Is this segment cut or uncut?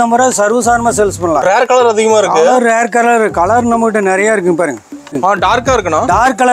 cut